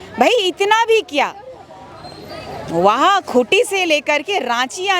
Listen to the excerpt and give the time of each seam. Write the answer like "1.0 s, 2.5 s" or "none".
none